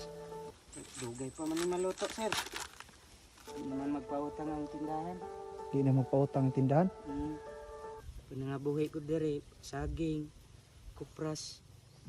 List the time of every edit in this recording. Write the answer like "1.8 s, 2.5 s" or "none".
8.0 s